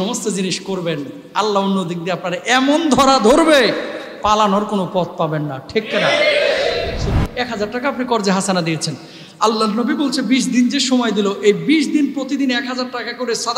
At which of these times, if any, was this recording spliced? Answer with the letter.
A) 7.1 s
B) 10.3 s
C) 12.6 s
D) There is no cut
A